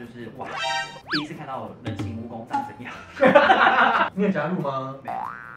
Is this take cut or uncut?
cut